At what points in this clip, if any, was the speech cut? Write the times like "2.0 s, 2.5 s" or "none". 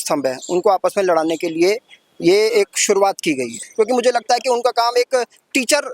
3.6 s